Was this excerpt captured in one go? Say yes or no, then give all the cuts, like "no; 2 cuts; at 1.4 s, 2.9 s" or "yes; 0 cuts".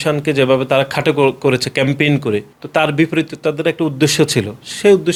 yes; 0 cuts